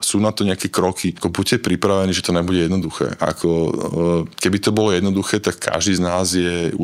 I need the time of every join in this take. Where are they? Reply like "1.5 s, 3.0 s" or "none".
1.1 s